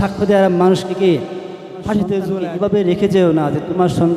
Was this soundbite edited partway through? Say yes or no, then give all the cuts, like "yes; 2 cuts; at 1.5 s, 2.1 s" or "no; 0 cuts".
yes; 1 cut; at 2.5 s